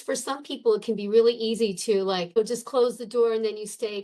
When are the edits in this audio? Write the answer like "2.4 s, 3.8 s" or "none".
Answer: 2.4 s